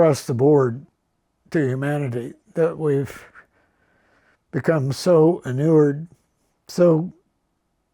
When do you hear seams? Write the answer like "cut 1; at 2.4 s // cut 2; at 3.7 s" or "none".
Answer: none